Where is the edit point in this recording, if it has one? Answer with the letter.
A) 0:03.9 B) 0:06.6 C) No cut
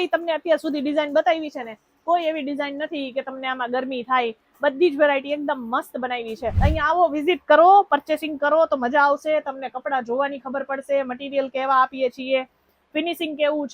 B